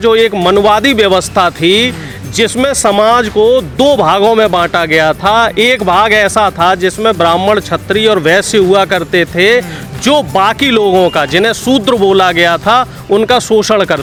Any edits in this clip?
no; 0 cuts

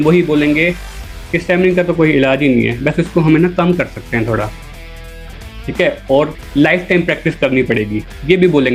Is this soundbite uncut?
yes; 0 cuts

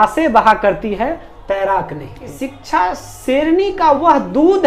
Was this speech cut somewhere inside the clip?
yes; 1 cut; at 2.3 s

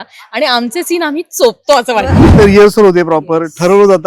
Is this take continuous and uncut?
no; 1 cut; at 2.2 s

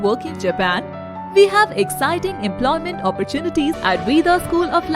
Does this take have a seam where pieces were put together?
yes; 1 cut; at 3.8 s

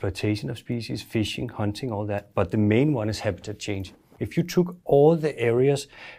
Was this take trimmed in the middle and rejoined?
yes; 1 cut; at 4.1 s

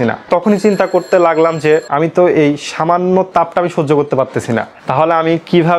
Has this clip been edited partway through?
no; 0 cuts

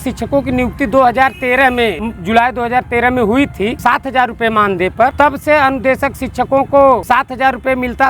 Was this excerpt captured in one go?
no; 4 cuts; at 2.1 s, 3.8 s, 5.1 s, 7.0 s

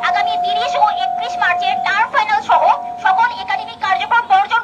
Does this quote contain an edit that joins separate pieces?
no; 0 cuts

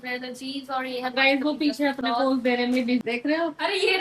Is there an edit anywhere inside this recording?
yes; 1 cut; at 3.0 s

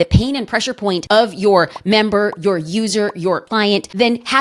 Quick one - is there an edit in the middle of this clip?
yes; 2 cuts; at 1.0 s, 3.5 s

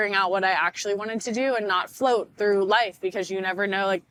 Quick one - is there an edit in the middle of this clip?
no; 0 cuts

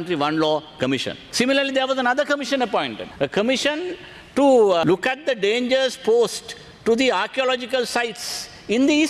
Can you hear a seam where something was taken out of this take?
yes; 3 cuts; at 1.2 s, 3.0 s, 4.8 s

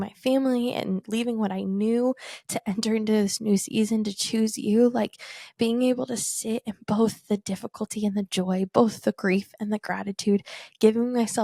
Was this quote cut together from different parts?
no; 0 cuts

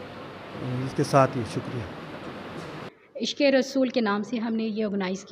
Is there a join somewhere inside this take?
yes; 1 cut; at 2.9 s

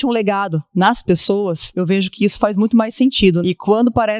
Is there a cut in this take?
yes; 2 cuts; at 1.7 s, 3.4 s

